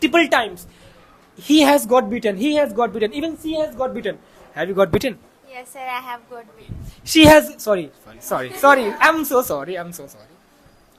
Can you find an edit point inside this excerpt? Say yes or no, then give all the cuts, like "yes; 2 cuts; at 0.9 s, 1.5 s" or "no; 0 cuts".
no; 0 cuts